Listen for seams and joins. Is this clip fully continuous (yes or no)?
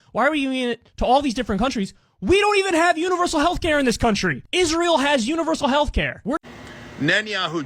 no